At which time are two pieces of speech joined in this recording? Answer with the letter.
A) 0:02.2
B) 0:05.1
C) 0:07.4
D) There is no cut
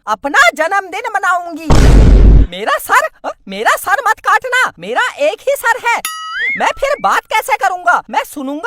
D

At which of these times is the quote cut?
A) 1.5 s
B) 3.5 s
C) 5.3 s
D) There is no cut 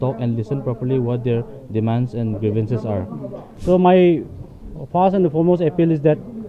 B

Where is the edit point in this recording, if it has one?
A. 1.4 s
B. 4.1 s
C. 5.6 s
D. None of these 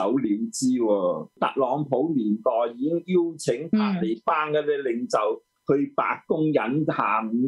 A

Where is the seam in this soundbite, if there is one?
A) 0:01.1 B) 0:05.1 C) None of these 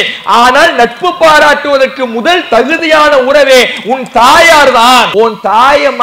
B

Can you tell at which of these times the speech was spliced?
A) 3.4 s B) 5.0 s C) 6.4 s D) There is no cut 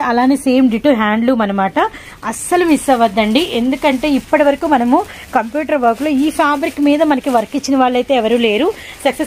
D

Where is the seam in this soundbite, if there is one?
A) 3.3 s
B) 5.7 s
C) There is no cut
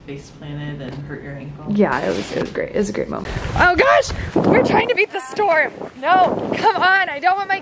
A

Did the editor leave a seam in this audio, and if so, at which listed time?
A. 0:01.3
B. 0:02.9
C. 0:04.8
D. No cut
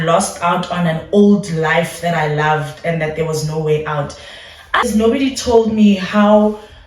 C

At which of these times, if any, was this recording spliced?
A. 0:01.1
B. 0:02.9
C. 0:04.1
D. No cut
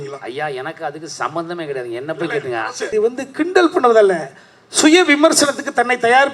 B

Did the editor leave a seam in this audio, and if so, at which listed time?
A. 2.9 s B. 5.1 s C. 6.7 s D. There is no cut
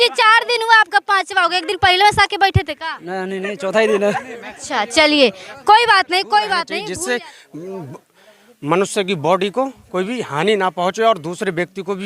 C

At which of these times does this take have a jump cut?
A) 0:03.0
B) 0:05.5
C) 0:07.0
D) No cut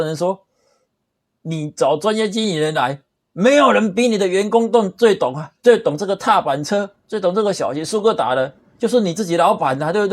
B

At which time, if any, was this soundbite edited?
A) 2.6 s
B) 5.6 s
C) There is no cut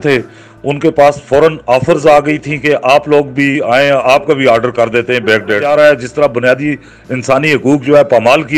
B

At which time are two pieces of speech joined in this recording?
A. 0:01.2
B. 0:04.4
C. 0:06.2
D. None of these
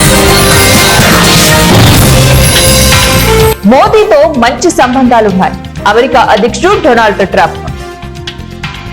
A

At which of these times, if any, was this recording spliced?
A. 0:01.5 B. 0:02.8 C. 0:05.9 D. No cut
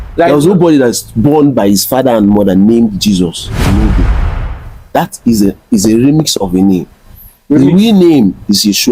D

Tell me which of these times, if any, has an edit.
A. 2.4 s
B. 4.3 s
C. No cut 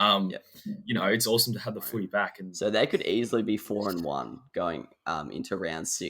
A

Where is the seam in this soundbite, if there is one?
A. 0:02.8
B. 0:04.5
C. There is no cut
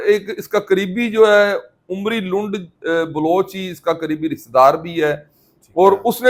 C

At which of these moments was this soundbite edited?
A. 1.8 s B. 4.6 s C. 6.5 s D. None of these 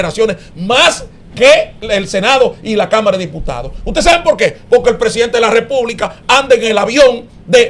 A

